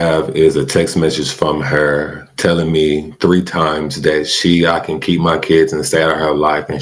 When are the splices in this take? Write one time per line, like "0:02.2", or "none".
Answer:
none